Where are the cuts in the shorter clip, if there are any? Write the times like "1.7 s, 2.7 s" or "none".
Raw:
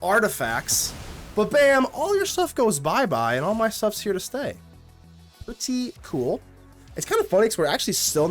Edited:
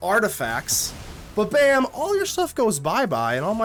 none